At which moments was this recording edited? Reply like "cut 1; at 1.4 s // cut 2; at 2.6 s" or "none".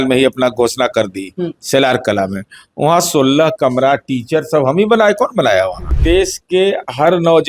cut 1; at 6.0 s